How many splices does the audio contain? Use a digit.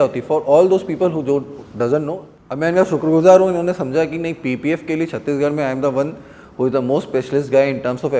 1